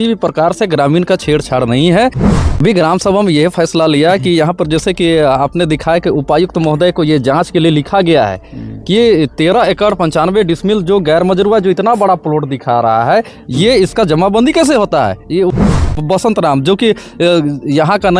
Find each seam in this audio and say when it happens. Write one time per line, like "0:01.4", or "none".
0:02.2
0:15.7